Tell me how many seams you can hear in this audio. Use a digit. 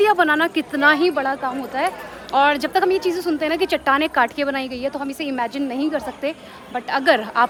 0